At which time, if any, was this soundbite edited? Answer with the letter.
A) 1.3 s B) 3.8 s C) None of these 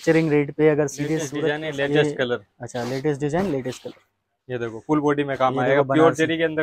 A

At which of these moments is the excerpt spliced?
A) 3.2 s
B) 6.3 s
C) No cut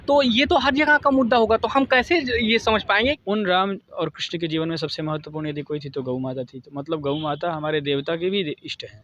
A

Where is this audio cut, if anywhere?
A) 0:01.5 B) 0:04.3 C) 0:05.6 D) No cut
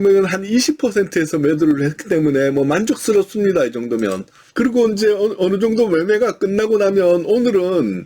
B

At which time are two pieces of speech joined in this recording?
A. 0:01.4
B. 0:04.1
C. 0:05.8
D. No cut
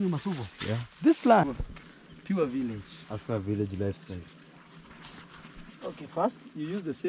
A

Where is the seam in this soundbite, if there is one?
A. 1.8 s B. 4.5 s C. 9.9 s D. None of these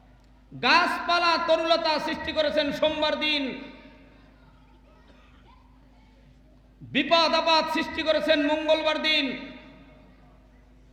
D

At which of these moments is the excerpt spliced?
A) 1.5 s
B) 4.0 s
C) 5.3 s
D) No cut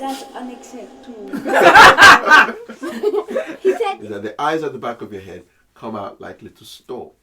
B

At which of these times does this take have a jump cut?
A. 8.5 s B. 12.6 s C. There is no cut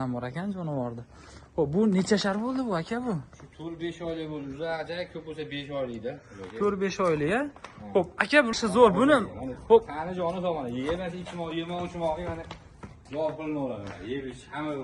A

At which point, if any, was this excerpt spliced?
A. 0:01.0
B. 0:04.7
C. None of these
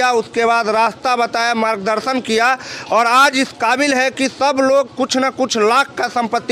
C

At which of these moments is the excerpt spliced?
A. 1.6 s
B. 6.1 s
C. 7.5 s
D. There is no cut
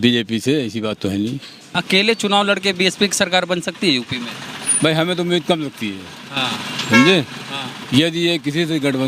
A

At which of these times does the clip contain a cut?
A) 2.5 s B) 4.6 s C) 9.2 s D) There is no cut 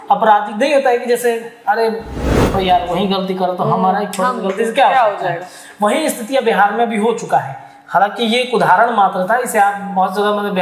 A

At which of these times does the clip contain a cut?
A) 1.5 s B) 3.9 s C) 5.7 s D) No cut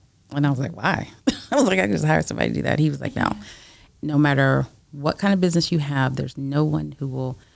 B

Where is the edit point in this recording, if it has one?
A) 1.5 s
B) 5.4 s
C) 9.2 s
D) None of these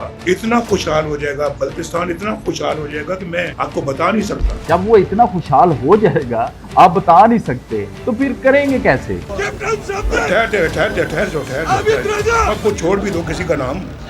C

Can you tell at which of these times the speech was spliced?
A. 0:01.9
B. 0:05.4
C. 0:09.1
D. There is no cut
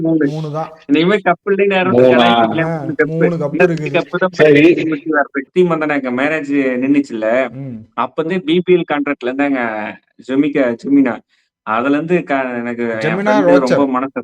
B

